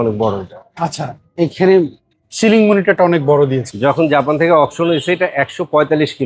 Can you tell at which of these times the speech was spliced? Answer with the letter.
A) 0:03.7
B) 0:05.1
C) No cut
A